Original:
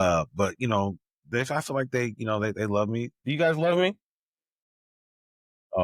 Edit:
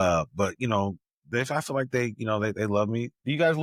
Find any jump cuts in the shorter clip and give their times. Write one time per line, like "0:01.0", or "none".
none

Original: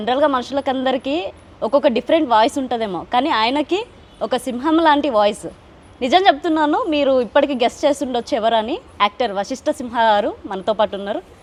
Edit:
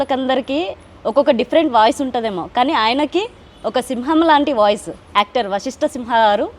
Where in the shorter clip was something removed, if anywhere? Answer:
0:05.0

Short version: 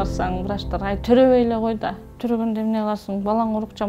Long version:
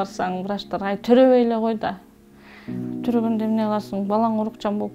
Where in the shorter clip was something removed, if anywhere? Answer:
0:02.1

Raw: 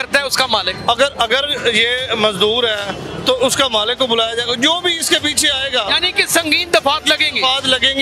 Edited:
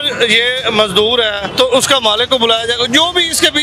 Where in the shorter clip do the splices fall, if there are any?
0:01.4

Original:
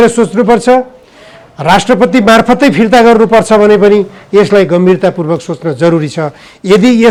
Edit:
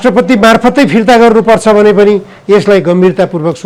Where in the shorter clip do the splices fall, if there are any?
none

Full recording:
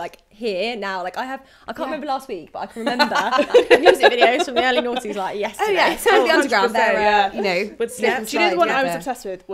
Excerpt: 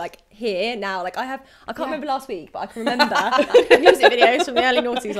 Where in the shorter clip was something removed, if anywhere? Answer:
none

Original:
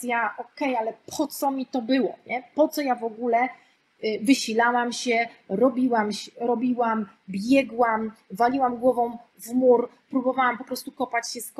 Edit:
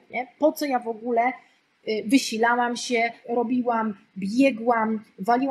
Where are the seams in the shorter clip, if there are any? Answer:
0:03.2

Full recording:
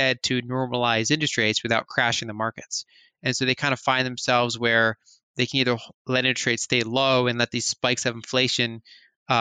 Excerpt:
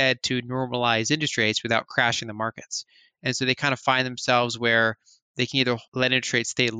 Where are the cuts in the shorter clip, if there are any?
0:05.9

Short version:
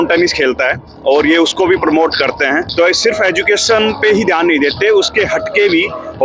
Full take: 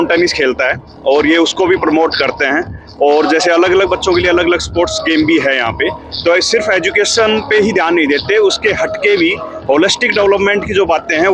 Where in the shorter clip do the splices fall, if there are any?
0:02.7

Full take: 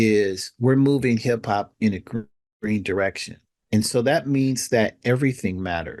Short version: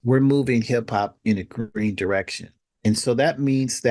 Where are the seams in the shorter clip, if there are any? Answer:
0:01.7

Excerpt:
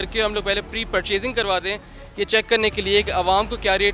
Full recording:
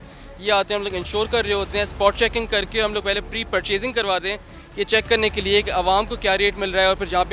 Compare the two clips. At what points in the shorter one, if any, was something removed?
none

